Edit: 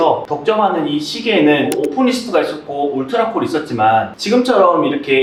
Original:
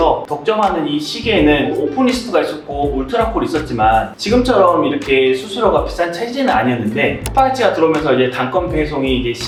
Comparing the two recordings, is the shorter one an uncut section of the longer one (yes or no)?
yes